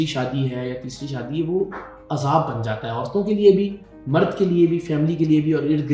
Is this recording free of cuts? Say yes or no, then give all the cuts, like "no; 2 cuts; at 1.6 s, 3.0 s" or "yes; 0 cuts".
yes; 0 cuts